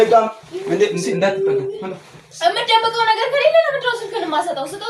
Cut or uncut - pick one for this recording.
uncut